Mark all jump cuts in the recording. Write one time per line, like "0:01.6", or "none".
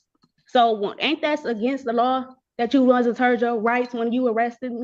none